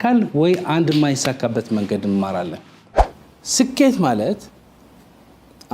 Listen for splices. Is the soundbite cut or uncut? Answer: cut